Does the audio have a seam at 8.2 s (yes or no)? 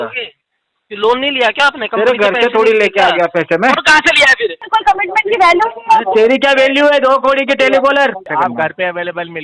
yes